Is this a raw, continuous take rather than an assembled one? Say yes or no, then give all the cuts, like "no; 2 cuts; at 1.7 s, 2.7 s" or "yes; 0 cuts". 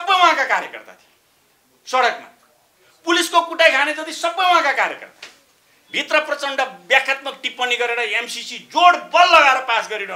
yes; 0 cuts